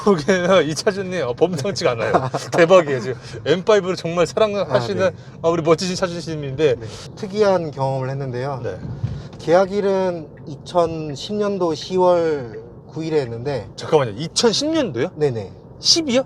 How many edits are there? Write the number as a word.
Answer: one